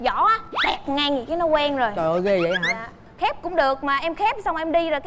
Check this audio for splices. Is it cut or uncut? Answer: uncut